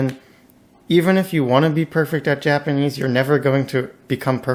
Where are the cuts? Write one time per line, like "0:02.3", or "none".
none